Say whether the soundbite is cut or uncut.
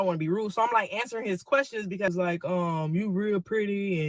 cut